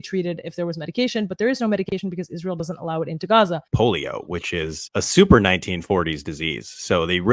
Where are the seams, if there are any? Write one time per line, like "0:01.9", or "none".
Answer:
0:03.7